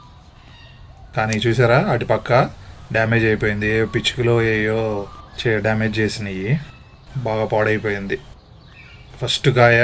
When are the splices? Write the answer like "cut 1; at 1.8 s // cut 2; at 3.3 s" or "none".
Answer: none